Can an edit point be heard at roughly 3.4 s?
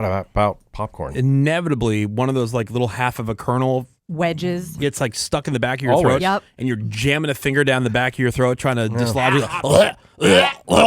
no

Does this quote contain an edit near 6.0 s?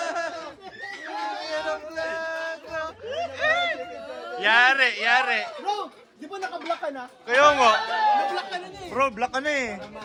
no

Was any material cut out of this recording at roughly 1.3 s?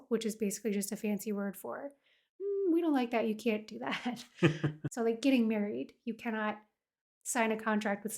no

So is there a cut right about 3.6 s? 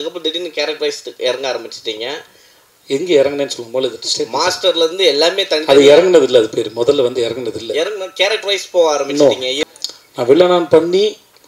no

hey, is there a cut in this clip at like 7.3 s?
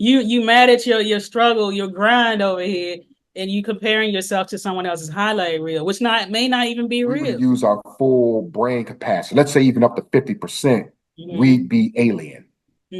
yes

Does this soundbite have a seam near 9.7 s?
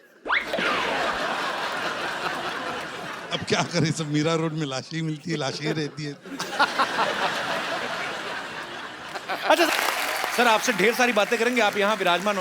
yes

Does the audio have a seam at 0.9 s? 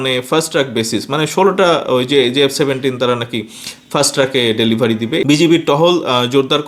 no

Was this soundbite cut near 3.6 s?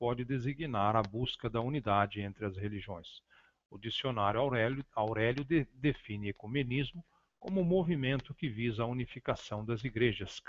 no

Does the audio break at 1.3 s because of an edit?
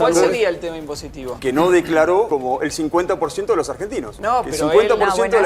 yes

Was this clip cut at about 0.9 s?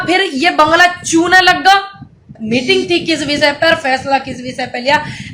no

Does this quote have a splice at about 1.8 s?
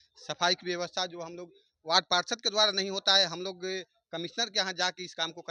no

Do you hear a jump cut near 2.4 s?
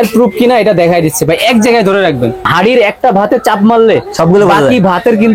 yes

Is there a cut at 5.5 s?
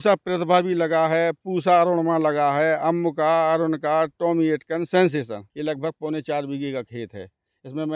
yes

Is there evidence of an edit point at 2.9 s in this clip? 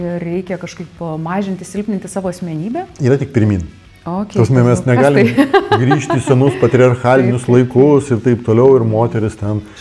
yes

